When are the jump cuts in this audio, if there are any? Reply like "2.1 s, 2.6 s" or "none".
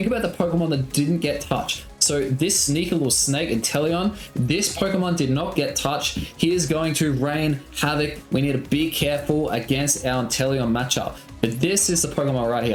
none